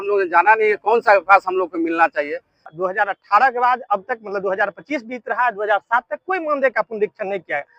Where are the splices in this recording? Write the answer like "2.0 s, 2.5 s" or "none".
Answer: 2.7 s

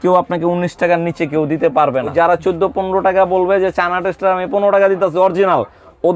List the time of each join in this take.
2.1 s

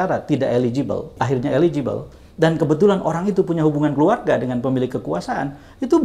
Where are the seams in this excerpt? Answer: 1.1 s

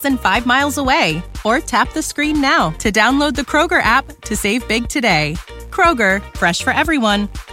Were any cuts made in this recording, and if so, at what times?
none

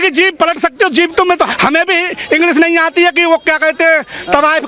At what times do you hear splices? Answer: 1.5 s

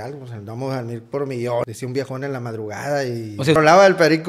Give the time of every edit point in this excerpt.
1.7 s, 3.6 s

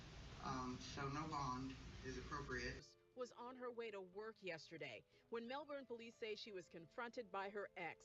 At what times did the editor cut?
2.9 s

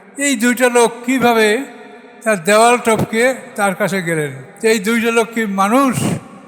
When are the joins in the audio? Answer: 4.4 s

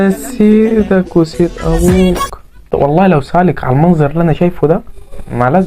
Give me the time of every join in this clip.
2.7 s

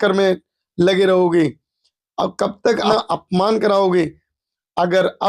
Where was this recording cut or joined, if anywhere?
2.9 s

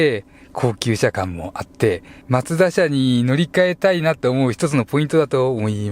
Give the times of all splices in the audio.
2.1 s

